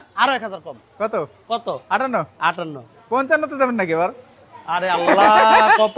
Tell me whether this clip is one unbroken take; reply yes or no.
yes